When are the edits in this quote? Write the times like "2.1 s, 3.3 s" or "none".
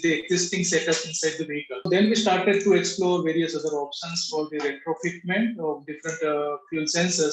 1.9 s